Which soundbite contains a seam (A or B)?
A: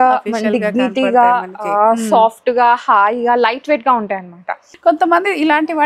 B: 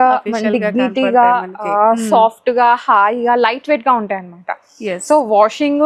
A